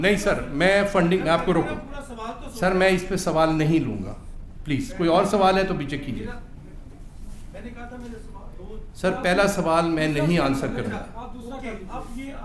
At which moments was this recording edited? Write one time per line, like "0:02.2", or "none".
none